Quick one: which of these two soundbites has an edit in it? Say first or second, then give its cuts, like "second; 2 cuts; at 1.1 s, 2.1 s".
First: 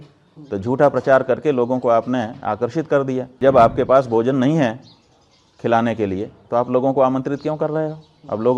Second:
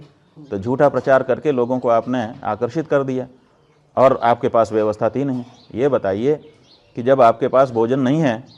first; 1 cut; at 3.3 s